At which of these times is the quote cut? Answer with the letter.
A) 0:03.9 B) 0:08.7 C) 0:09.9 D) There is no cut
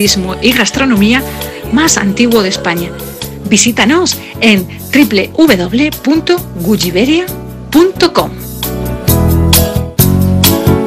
C